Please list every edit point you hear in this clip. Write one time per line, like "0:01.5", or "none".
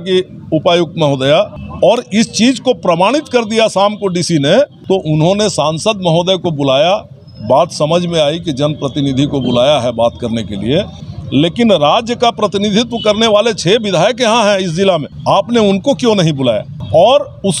0:01.6
0:04.8
0:11.0
0:15.1
0:16.7